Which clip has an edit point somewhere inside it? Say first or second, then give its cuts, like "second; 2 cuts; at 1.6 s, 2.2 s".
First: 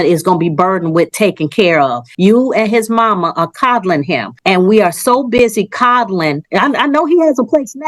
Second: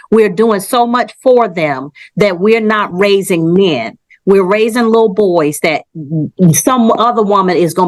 first; 2 cuts; at 2.0 s, 4.3 s